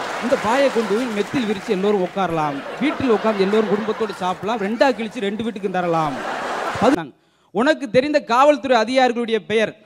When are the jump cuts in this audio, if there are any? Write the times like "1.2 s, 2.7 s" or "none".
6.9 s